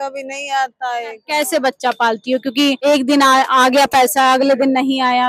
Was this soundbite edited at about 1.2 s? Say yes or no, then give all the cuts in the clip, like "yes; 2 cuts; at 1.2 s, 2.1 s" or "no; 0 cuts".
yes; 2 cuts; at 1.2 s, 2.8 s